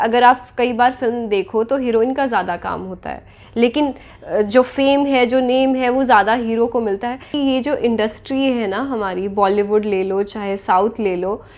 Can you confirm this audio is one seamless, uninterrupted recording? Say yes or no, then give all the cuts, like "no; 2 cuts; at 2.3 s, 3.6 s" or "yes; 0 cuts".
no; 1 cut; at 7.3 s